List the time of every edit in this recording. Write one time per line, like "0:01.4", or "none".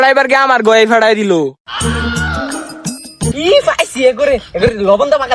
0:03.3